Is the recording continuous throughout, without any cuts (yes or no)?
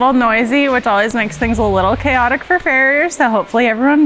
yes